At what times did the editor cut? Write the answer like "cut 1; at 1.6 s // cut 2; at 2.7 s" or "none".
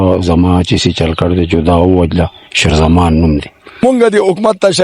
cut 1; at 3.6 s